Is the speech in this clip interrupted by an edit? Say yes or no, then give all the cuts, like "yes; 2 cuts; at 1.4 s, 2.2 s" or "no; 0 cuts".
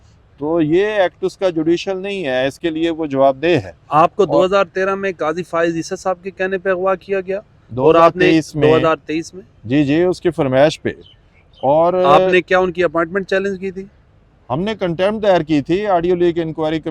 no; 0 cuts